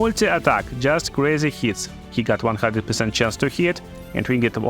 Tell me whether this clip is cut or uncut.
cut